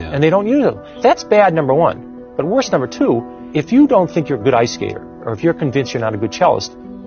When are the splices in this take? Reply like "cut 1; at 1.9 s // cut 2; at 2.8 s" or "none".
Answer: cut 1; at 0.9 s // cut 2; at 3.4 s